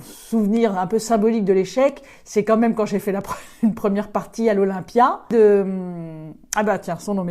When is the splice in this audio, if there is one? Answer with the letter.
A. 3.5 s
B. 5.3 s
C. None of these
B